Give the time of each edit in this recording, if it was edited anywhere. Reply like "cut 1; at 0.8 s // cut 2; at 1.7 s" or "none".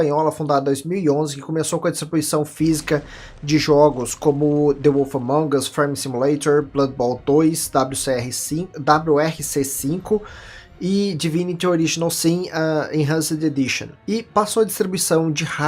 cut 1; at 3.7 s

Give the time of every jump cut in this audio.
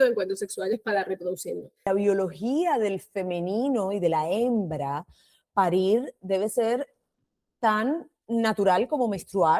cut 1; at 1.8 s

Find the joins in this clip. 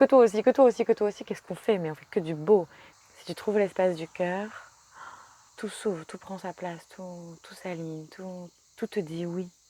cut 1; at 2.8 s // cut 2; at 5.5 s // cut 3; at 8.6 s

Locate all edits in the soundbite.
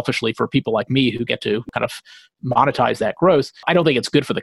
cut 1; at 1.7 s // cut 2; at 3.7 s

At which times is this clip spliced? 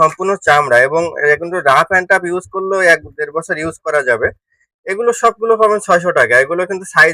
none

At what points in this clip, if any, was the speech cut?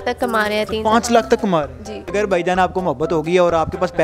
cut 1; at 2.1 s

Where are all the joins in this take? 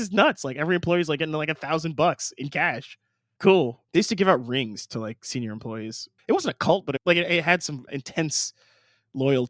cut 1; at 3.8 s // cut 2; at 6.1 s // cut 3; at 7.0 s // cut 4; at 7.9 s

